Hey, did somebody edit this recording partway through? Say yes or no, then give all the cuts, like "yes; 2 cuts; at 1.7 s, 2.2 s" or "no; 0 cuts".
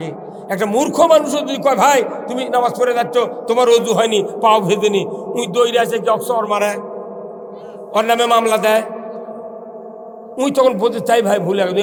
no; 0 cuts